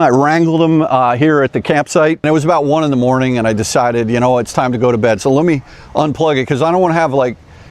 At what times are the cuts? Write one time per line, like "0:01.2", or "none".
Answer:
0:02.2